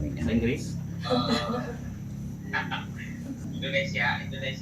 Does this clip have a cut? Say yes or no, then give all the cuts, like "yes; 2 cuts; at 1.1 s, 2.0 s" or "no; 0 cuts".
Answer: yes; 1 cut; at 3.4 s